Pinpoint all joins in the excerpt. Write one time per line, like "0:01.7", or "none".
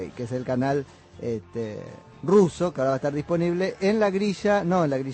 0:01.9